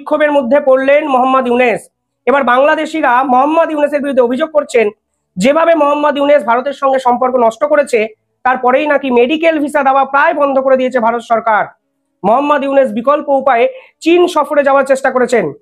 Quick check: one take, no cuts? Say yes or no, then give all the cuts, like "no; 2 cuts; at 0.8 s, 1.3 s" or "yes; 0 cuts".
yes; 0 cuts